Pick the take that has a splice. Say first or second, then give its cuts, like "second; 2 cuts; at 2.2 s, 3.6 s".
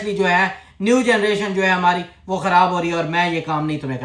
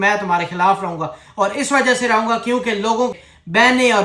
second; 1 cut; at 3.2 s